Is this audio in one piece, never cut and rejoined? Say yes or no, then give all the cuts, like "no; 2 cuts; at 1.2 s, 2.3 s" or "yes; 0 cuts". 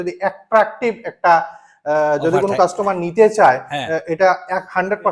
yes; 0 cuts